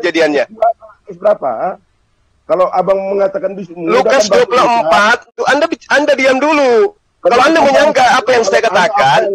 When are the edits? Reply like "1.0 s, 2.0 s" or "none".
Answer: 5.3 s

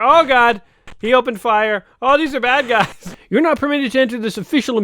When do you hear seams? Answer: 3.0 s

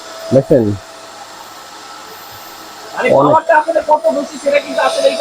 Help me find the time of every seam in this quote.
none

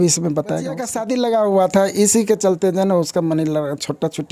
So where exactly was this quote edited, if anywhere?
0.9 s

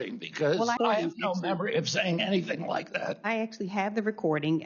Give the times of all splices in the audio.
0.8 s, 3.2 s

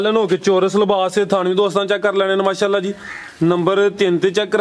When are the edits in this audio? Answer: none

